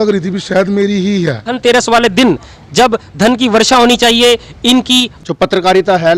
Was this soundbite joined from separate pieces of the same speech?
yes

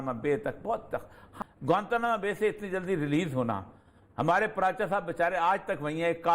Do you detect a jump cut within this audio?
yes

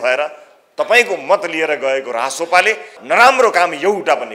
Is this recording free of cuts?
no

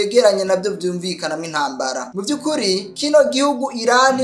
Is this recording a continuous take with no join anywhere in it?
no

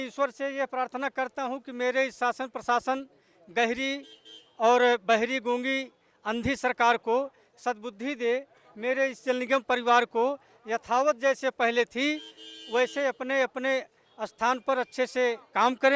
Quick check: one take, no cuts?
yes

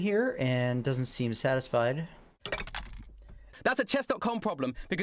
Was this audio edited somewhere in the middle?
yes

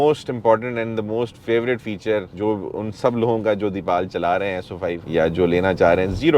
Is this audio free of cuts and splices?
yes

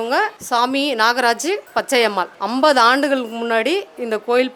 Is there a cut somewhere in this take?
no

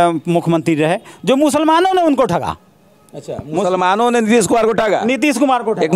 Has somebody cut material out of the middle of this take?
no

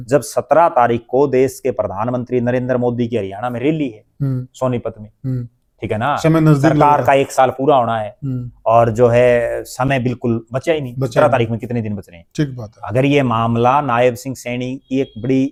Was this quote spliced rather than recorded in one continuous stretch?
no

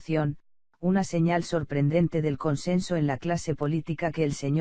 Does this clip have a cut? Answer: yes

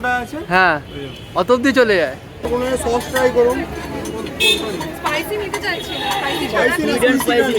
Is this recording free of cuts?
no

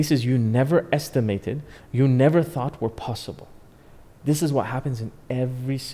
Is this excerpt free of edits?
yes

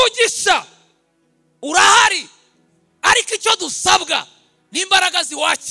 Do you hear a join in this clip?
no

